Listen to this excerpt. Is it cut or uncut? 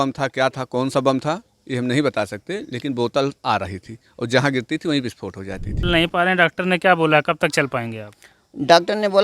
cut